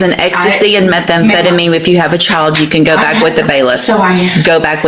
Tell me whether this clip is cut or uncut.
uncut